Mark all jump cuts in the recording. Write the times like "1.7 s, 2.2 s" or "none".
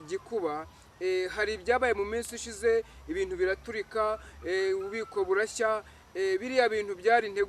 none